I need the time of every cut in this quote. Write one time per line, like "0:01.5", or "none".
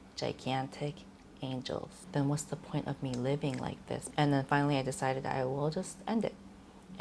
0:01.9
0:04.0